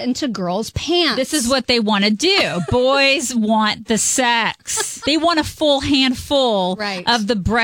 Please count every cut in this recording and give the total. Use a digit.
1